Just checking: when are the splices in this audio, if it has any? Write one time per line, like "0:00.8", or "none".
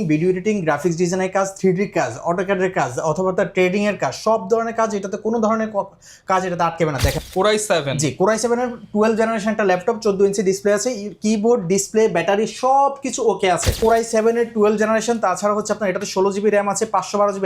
0:07.2
0:13.8

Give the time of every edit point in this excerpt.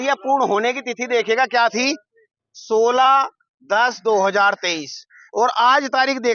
none

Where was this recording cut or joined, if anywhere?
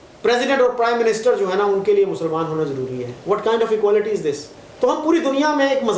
0:04.4

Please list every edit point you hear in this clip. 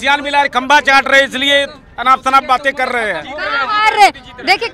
none

